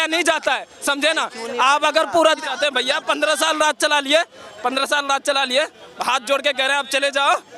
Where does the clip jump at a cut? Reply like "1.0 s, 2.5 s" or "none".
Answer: 2.5 s